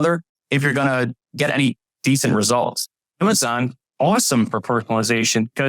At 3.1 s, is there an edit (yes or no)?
yes